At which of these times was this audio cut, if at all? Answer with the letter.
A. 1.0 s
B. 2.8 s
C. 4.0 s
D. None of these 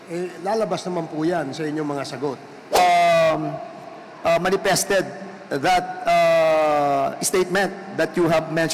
B